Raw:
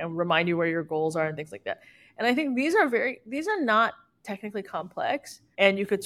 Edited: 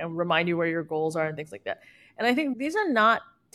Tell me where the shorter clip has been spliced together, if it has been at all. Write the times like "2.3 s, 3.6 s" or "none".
2.5 s